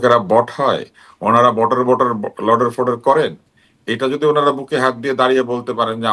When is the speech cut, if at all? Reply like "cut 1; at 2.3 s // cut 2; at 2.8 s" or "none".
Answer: none

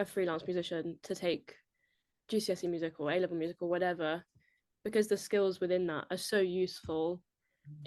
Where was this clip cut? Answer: none

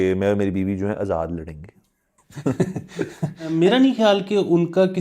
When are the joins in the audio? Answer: cut 1; at 3.5 s

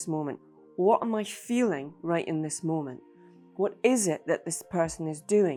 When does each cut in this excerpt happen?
none

